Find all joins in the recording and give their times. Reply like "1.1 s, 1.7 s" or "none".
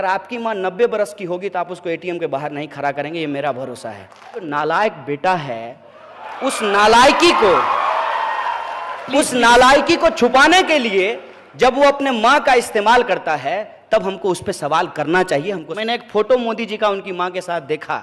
4.5 s, 15.7 s